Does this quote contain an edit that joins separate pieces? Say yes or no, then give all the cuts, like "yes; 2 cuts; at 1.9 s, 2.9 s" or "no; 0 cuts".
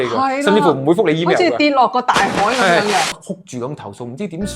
yes; 1 cut; at 3.1 s